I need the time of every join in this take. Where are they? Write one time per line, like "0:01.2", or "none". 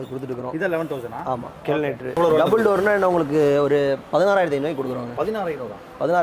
0:02.2

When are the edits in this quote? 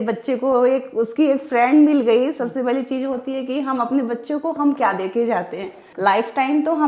none

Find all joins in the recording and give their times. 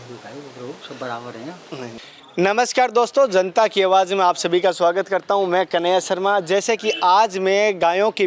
0:02.0

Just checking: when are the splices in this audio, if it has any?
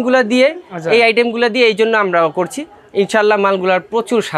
none

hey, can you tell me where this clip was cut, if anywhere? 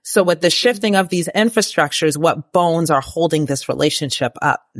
none

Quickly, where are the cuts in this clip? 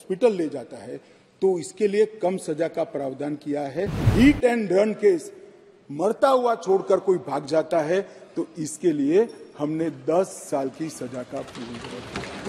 0:04.1

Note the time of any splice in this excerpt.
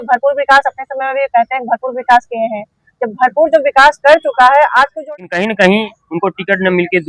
0:05.0

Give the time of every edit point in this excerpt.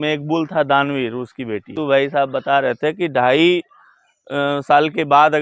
0:01.7

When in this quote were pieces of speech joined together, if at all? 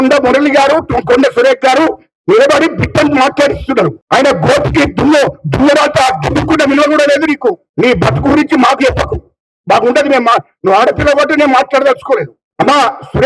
0:04.0

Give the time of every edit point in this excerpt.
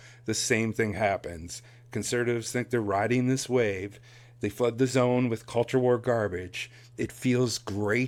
none

